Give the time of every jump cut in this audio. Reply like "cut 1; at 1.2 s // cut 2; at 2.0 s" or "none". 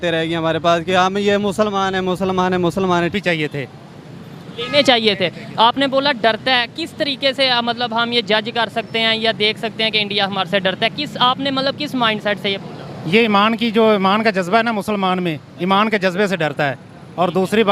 cut 1; at 3.1 s